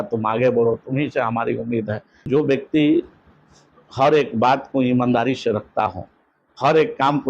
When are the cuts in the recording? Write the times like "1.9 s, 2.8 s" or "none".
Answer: 2.1 s